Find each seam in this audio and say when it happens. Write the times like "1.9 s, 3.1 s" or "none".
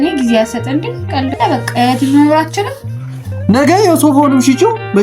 1.3 s

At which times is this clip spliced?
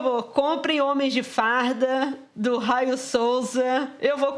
none

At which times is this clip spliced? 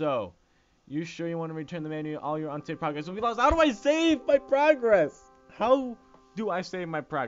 1.3 s

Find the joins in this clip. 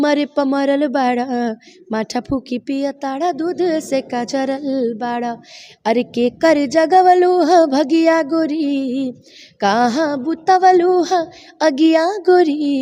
none

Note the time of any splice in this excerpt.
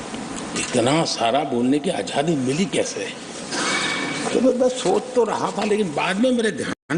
none

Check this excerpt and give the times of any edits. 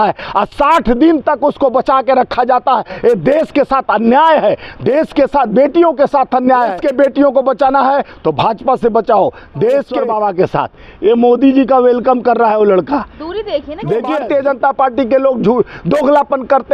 6.8 s, 10.0 s, 14.2 s

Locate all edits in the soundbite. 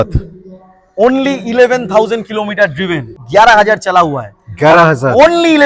3.2 s

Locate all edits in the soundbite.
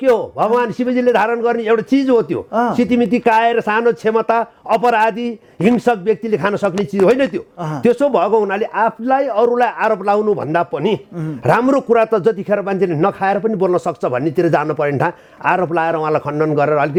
none

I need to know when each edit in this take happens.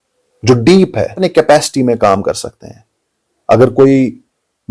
1.1 s

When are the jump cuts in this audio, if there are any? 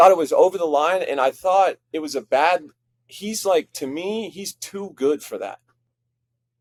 none

